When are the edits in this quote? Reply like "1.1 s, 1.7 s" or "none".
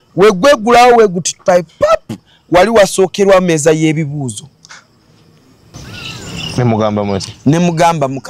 5.7 s